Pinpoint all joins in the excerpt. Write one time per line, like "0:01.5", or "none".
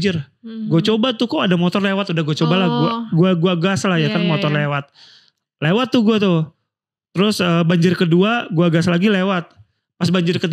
none